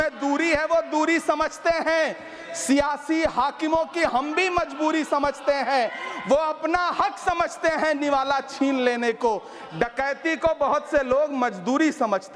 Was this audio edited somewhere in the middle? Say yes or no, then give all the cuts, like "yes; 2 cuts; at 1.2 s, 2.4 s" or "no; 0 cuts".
no; 0 cuts